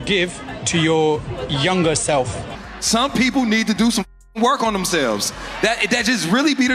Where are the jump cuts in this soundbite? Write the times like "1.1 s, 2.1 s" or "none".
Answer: 2.6 s